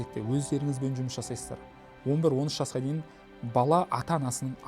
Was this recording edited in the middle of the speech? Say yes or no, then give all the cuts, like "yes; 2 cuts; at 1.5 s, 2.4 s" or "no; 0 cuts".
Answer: no; 0 cuts